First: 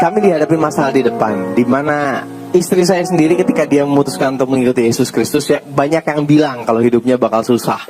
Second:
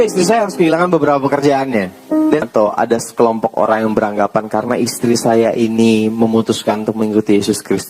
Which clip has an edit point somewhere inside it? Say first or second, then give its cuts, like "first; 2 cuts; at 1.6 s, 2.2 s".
second; 1 cut; at 2.4 s